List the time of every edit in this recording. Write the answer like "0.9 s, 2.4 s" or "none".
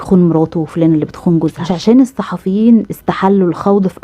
1.7 s